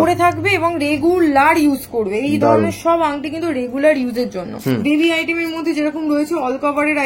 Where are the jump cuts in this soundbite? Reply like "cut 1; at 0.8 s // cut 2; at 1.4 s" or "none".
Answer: cut 1; at 4.6 s